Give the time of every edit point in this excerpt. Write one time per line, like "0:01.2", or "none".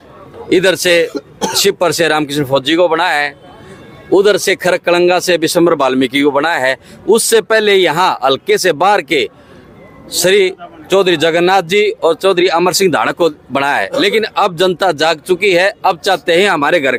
none